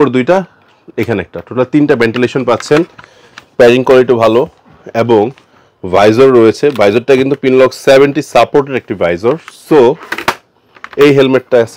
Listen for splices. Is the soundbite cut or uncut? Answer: uncut